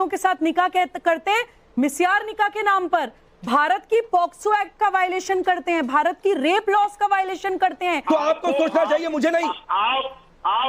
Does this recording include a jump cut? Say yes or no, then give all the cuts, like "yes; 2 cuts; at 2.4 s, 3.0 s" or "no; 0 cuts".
yes; 1 cut; at 8.0 s